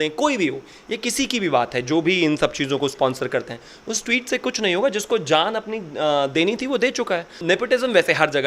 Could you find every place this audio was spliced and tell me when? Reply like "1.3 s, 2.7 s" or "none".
7.4 s